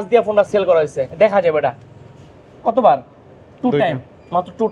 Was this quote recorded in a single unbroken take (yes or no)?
yes